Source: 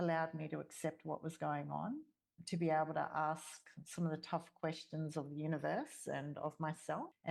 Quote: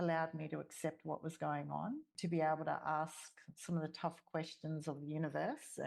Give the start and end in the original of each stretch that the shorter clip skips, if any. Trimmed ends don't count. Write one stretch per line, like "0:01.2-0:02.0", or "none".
0:02.1-0:02.4